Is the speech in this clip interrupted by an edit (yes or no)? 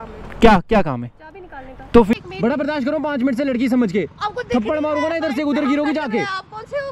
yes